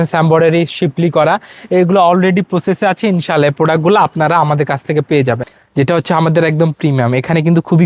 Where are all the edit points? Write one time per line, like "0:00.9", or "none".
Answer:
0:05.5